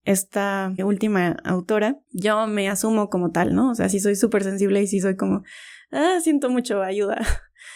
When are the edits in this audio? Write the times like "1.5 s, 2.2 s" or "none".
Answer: none